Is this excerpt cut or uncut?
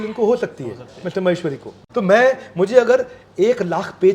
cut